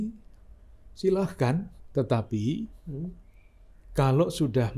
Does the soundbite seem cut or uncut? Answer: cut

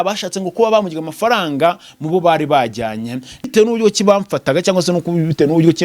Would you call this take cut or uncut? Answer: cut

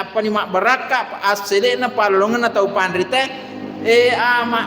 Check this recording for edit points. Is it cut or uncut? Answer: uncut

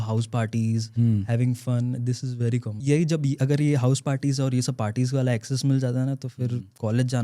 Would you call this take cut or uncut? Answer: cut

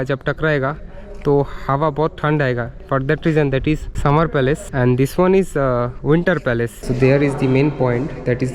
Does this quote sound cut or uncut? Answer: cut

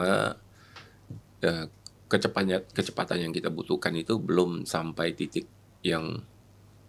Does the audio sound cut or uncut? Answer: uncut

